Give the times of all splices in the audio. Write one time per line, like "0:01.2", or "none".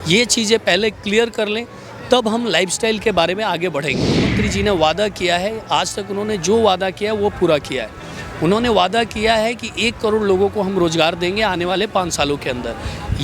0:04.4

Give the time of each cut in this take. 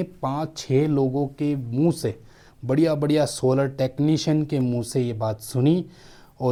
none

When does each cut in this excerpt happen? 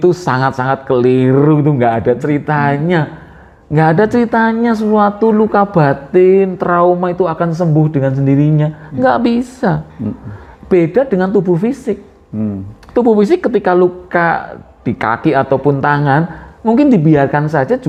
none

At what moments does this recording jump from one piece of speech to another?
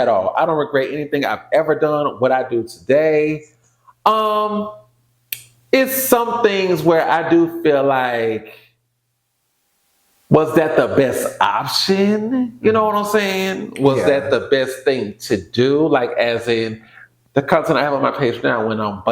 none

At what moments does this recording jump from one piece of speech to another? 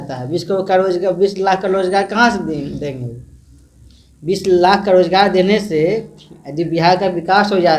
none

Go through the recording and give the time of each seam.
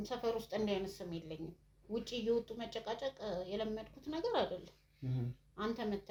none

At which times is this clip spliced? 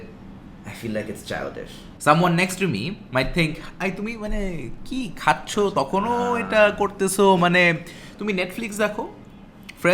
0:01.8

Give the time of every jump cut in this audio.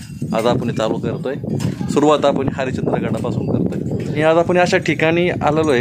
0:01.7
0:04.2

